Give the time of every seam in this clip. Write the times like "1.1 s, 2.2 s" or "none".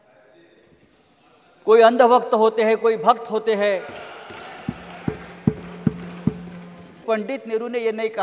7.0 s